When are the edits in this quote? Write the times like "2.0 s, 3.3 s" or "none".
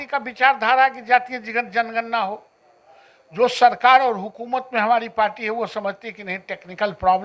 none